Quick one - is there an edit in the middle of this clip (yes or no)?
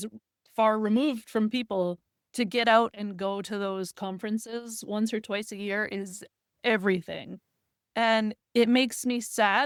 no